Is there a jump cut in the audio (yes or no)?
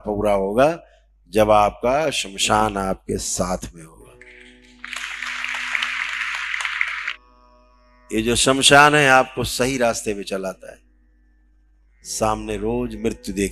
yes